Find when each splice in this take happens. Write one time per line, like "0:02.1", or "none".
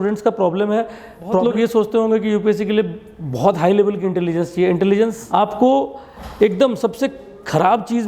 0:01.4
0:05.2